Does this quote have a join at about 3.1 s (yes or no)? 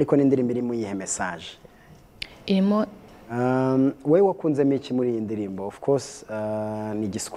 yes